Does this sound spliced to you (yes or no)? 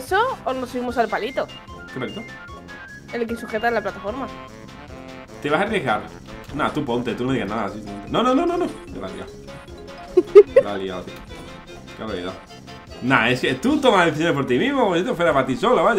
no